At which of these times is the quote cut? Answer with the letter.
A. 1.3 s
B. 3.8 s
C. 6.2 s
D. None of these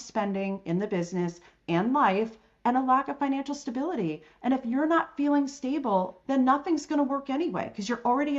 C